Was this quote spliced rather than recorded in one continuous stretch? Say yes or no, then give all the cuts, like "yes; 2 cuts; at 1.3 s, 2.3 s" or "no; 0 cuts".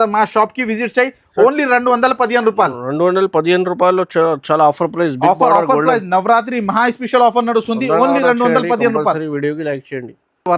no; 0 cuts